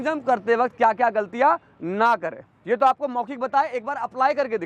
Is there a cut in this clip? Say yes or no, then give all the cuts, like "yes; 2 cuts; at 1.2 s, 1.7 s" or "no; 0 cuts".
no; 0 cuts